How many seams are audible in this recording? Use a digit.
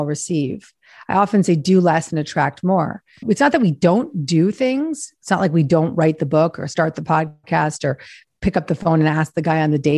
1